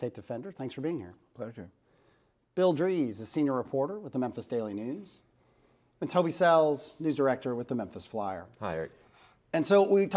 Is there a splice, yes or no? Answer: yes